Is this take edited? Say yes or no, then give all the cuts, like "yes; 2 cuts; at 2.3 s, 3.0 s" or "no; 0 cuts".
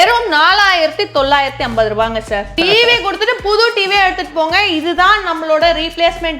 yes; 1 cut; at 2.5 s